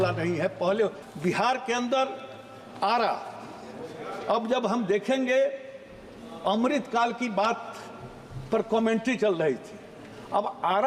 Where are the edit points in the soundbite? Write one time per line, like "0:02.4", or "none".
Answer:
0:01.0